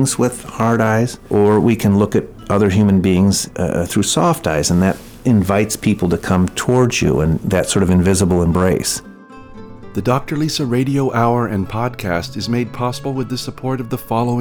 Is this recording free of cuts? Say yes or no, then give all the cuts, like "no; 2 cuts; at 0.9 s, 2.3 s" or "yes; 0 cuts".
no; 4 cuts; at 1.2 s, 3.5 s, 7.4 s, 9.5 s